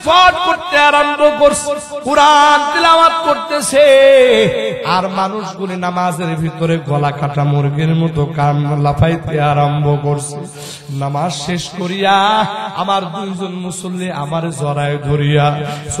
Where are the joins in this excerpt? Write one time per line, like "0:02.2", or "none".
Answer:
0:01.9